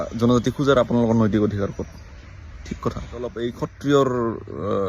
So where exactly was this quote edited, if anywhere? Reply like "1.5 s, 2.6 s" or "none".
3.4 s